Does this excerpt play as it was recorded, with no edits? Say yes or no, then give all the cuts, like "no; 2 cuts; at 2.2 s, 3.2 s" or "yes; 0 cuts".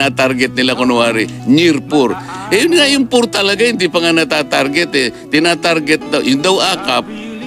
yes; 0 cuts